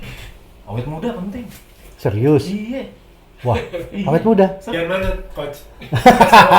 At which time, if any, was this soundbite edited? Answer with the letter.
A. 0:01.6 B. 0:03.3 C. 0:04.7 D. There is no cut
C